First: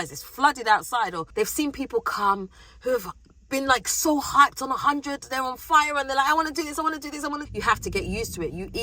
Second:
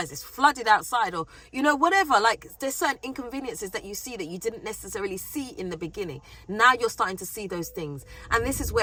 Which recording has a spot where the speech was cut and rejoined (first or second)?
first